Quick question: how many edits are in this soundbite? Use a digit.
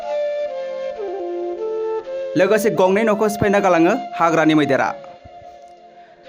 1